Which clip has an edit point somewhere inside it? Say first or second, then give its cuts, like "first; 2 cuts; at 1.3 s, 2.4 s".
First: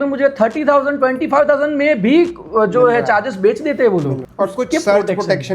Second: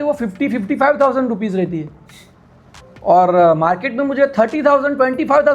first; 1 cut; at 4.2 s